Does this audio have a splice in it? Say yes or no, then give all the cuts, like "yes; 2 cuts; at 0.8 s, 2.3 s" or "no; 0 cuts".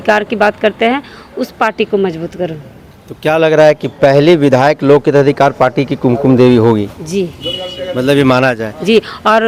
no; 0 cuts